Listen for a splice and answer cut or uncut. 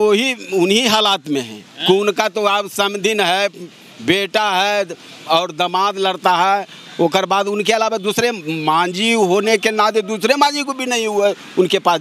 uncut